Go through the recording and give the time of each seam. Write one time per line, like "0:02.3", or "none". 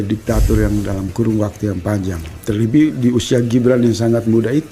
none